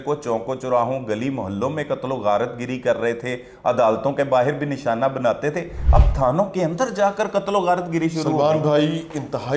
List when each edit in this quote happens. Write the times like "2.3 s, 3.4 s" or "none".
none